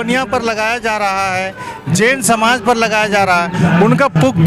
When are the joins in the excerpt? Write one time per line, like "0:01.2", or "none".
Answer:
none